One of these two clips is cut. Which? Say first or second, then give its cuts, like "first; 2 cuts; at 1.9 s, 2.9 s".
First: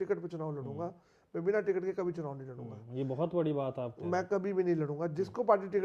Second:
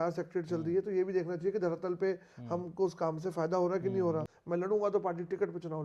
second; 1 cut; at 4.3 s